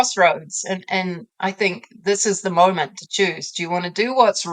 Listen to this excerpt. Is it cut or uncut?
uncut